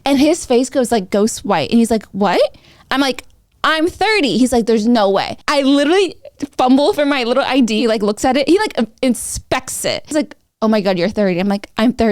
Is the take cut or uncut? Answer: cut